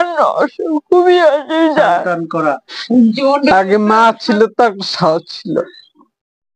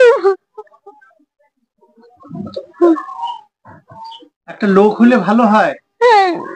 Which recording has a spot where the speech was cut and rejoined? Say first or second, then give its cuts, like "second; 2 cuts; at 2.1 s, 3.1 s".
first; 1 cut; at 2.7 s